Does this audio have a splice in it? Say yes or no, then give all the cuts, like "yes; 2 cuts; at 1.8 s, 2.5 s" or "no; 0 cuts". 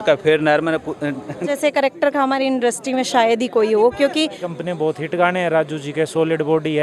yes; 2 cuts; at 1.5 s, 4.4 s